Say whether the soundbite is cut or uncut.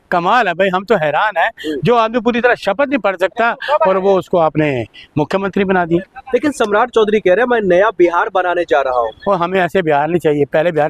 uncut